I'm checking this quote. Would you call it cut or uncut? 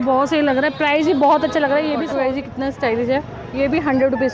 cut